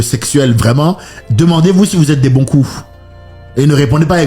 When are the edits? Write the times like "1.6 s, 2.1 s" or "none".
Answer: none